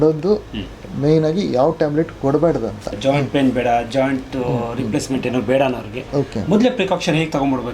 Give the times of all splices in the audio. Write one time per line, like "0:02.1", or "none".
0:02.9

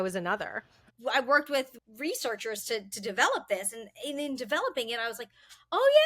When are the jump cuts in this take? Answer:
0:00.8
0:01.7

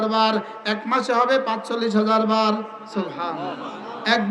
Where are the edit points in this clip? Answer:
none

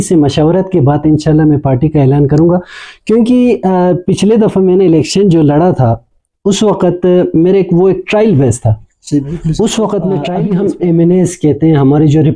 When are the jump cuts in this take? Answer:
0:10.3

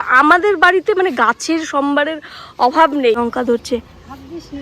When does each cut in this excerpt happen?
0:03.2

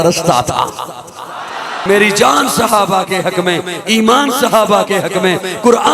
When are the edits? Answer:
0:01.8

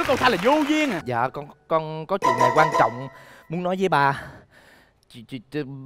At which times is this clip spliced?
0:01.0

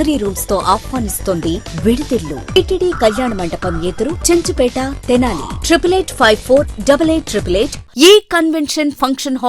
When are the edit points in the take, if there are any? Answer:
0:02.6
0:07.8

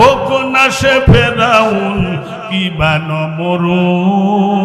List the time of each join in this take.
none

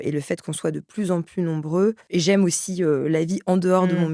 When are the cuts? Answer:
0:02.0

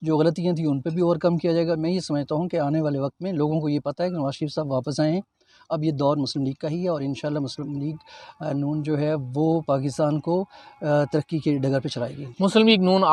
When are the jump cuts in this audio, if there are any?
none

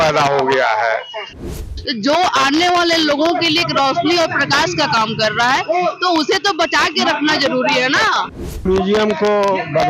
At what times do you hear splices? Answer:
0:01.4
0:08.6

